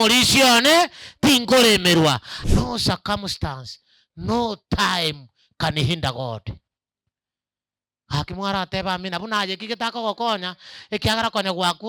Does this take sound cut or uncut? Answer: cut